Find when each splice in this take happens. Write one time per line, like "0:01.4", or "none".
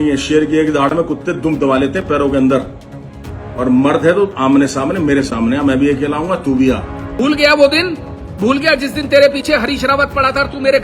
0:07.0